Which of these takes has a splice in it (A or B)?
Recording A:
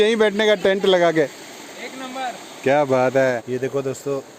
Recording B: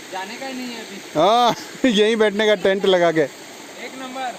A